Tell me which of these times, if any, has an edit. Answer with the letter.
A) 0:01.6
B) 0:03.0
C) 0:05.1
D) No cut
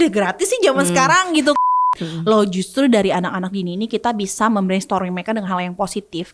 A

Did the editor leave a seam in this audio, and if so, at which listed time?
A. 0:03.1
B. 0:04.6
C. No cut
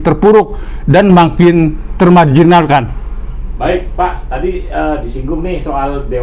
C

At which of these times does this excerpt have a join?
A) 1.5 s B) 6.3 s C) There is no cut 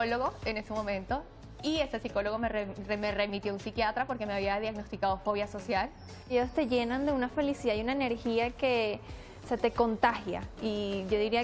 B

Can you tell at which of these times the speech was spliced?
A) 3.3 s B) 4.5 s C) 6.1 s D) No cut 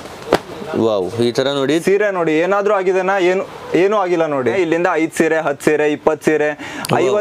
B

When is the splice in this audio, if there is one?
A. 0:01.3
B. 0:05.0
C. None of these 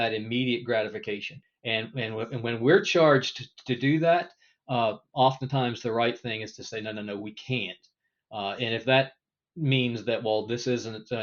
A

